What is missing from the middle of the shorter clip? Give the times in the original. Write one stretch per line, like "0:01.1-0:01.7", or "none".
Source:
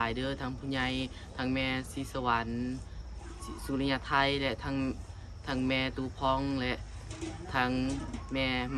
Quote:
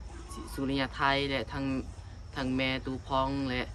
none